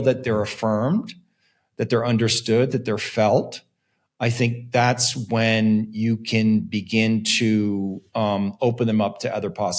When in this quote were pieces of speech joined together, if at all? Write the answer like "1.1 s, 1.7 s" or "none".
none